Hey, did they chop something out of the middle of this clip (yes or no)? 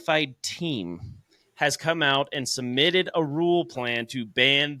no